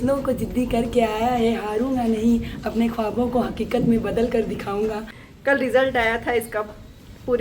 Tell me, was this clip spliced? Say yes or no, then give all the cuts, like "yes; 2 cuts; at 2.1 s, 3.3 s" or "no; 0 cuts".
yes; 1 cut; at 5.2 s